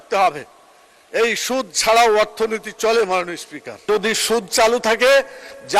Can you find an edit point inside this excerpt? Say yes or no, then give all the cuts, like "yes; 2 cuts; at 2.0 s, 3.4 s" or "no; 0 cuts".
yes; 1 cut; at 3.9 s